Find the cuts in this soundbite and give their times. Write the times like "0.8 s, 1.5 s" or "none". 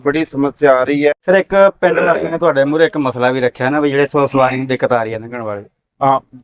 1.1 s